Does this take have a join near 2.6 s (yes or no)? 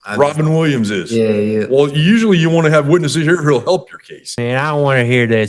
no